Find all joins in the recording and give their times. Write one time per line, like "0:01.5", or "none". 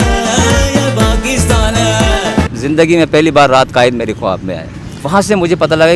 0:02.6
0:04.9